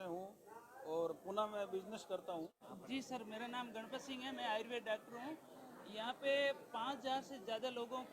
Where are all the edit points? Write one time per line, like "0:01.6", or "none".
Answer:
0:02.9